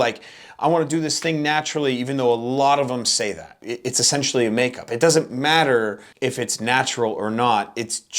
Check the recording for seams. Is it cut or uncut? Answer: cut